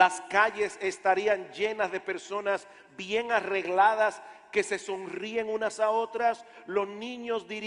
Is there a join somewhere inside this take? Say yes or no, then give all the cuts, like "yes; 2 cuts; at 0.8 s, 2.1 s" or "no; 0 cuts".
yes; 1 cut; at 3.1 s